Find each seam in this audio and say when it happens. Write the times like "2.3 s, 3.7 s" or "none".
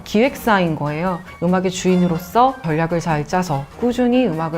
1.3 s